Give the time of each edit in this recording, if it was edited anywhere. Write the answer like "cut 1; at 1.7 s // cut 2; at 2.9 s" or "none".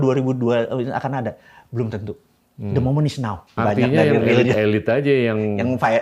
cut 1; at 3.6 s